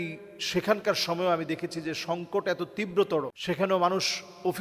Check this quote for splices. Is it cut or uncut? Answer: cut